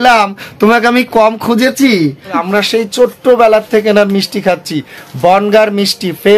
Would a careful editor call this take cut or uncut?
cut